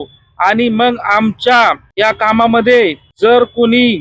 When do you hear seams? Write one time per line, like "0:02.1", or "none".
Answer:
0:01.9
0:03.0